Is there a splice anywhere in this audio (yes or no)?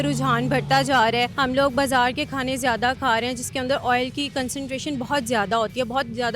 yes